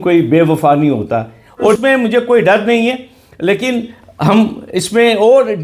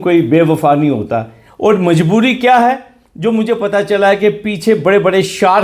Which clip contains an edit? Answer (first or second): first